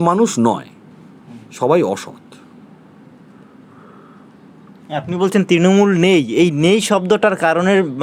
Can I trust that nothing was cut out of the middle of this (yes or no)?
yes